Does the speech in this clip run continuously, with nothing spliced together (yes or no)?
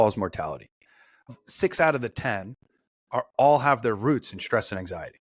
no